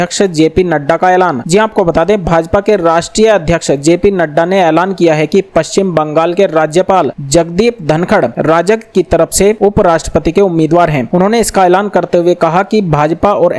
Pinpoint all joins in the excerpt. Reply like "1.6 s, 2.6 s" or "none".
none